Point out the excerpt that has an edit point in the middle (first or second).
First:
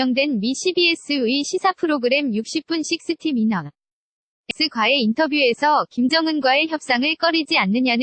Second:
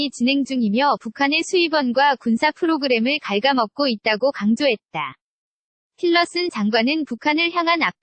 first